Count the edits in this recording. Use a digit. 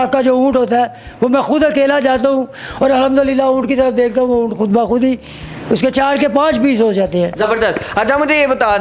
0